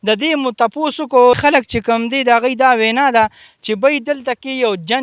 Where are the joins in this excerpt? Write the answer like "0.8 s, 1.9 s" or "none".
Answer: 1.6 s